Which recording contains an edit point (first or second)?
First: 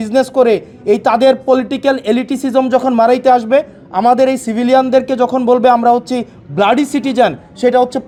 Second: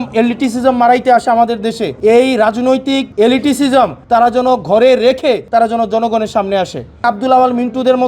second